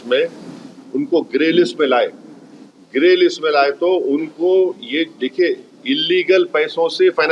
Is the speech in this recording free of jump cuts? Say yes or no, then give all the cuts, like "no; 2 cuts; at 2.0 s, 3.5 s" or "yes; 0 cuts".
yes; 0 cuts